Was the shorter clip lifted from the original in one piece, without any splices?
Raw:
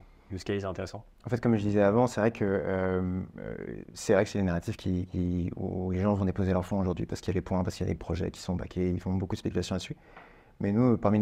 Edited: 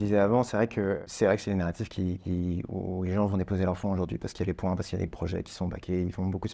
no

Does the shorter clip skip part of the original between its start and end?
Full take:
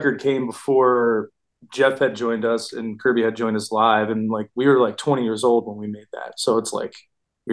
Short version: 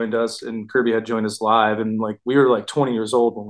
no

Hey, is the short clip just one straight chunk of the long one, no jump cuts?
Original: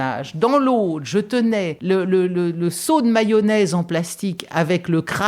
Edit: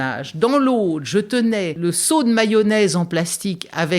no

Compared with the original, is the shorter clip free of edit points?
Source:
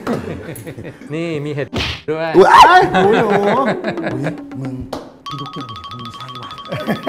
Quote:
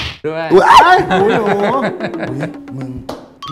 yes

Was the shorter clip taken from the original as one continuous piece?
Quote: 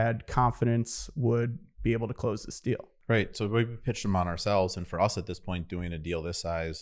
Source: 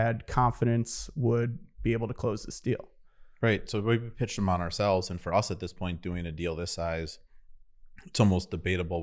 no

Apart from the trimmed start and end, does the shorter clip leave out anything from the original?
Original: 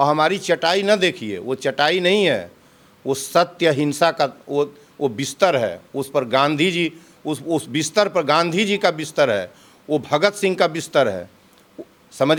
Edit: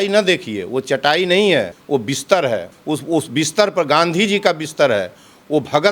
yes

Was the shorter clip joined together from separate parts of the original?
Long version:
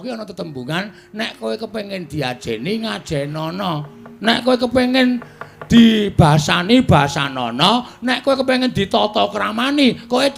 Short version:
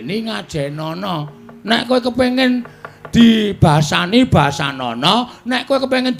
no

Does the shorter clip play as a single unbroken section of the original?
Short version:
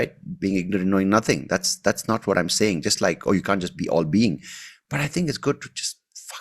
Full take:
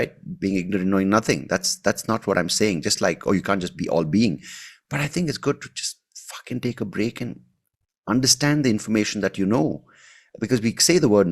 yes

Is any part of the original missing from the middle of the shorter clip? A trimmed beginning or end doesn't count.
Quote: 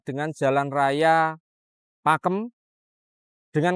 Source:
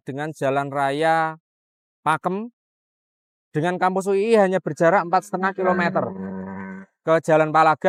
no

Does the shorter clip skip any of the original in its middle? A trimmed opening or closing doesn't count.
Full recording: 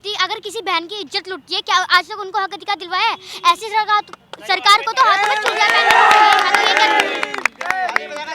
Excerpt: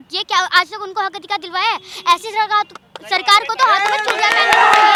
no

